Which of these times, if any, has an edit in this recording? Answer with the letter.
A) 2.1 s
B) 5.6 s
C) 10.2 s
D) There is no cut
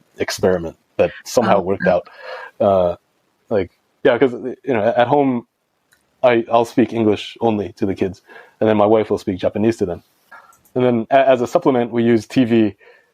C